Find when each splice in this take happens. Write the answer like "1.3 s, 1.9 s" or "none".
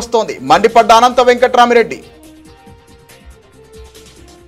2.1 s